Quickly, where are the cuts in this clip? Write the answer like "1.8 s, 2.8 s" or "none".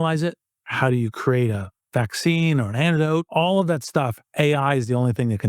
3.3 s